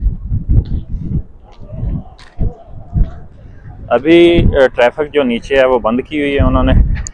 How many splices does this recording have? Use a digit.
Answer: 1